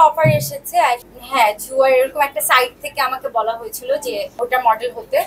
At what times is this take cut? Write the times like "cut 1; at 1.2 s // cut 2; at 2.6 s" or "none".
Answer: cut 1; at 1.1 s // cut 2; at 4.3 s